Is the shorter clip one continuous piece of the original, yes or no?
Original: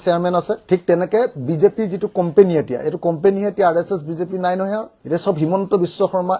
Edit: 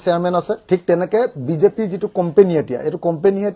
yes